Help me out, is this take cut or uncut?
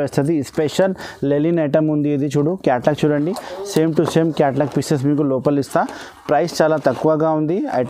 uncut